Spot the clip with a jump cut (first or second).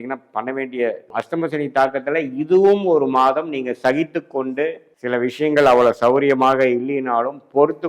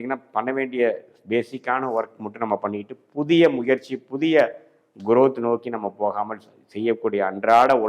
first